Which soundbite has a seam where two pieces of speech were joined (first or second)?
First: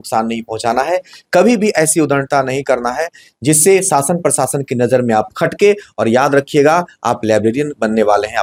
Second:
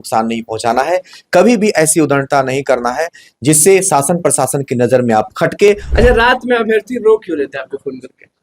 second